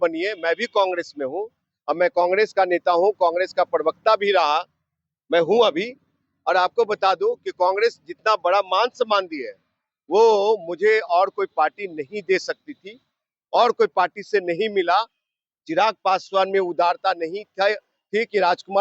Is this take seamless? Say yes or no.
yes